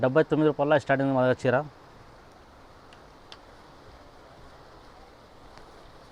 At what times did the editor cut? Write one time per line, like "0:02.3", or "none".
none

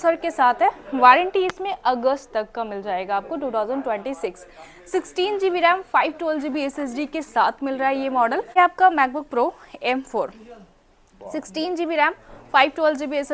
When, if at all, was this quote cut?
0:08.6

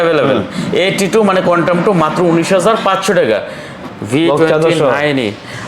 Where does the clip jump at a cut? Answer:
0:03.9

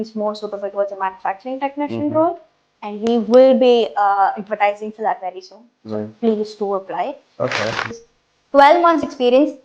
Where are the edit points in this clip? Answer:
0:07.9

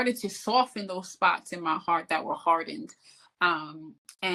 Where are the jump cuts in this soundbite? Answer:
none

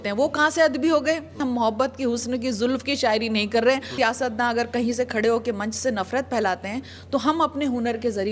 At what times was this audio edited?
0:01.3
0:03.9

